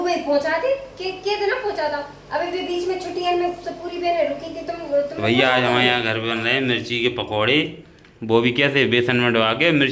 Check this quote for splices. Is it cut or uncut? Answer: cut